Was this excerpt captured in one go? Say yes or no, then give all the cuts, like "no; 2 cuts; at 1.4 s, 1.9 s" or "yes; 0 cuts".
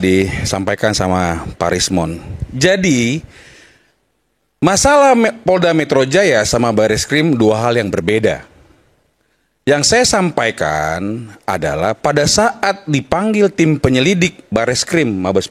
yes; 0 cuts